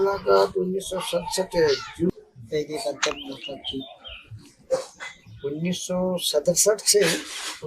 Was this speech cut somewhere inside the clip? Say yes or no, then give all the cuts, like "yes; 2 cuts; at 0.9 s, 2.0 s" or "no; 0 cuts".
yes; 1 cut; at 2.1 s